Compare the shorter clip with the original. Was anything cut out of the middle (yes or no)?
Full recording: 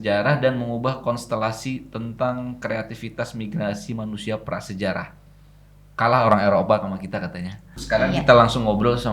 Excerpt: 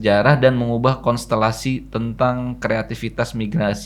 no